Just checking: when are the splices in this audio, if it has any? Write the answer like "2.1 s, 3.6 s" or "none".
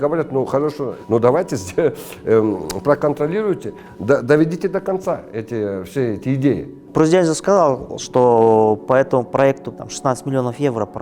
0.9 s, 6.9 s, 9.7 s